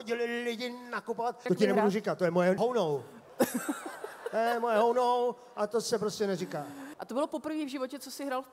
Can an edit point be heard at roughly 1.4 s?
yes; 3 cuts; at 1.4 s, 2.6 s, 6.8 s

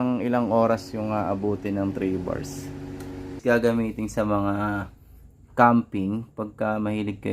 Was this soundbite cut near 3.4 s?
yes; 1 cut; at 3.4 s

